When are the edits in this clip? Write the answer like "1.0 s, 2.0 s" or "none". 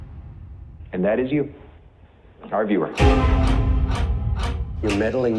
none